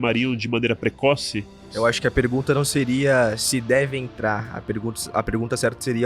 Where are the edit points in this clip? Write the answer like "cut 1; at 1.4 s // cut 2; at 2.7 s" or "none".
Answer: cut 1; at 1.7 s